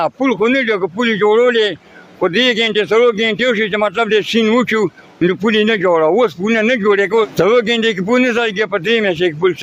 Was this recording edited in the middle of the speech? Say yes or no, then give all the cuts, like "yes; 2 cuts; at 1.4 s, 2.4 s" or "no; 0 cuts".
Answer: no; 0 cuts